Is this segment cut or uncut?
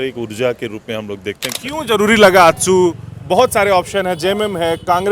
cut